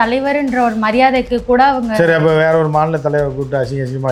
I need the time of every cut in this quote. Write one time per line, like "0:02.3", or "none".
none